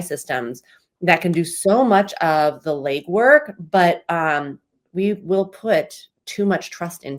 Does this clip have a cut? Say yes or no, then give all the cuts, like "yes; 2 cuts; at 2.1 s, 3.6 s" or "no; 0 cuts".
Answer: no; 0 cuts